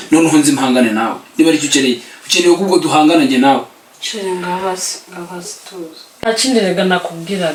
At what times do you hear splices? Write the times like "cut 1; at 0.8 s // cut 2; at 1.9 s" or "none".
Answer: none